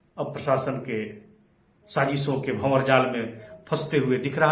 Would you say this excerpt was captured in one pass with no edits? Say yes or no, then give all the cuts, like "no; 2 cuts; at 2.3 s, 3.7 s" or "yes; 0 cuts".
yes; 0 cuts